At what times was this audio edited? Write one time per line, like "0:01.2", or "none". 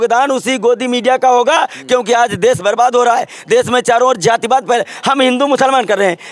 none